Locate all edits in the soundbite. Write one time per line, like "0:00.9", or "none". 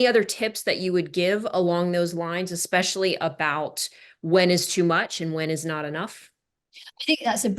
none